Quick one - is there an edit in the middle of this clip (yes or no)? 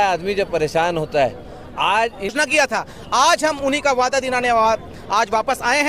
yes